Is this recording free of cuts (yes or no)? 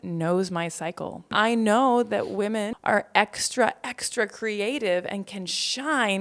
no